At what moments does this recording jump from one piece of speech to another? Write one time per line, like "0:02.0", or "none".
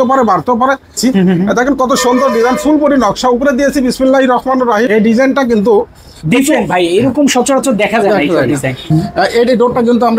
0:00.9
0:04.9
0:08.9